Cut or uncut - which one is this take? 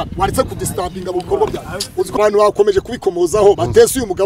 cut